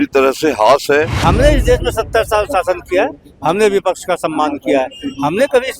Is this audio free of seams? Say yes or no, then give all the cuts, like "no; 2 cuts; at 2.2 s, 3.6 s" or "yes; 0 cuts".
no; 1 cut; at 1.1 s